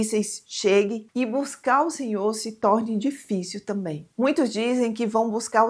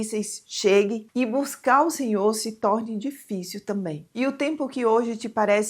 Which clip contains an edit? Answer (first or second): second